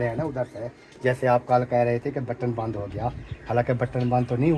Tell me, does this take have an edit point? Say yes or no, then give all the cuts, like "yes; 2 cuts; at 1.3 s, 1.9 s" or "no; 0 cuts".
no; 0 cuts